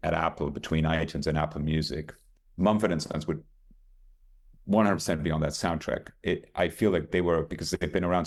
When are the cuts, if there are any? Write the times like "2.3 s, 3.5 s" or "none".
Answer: none